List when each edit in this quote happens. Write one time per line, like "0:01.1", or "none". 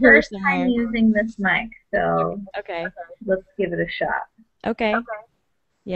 0:03.5